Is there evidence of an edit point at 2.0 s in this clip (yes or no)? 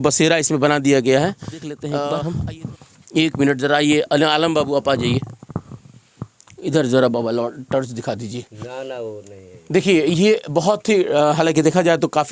yes